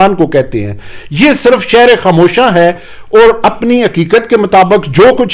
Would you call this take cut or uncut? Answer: uncut